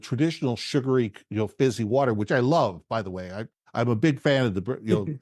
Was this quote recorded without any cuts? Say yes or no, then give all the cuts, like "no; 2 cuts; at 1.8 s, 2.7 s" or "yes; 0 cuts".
yes; 0 cuts